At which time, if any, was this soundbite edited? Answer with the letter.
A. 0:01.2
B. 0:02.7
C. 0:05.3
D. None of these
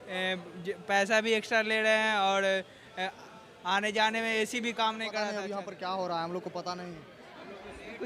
C